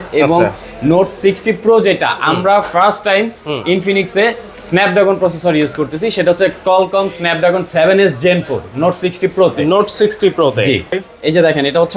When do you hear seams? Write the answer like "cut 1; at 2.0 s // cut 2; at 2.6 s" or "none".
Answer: cut 1; at 11.0 s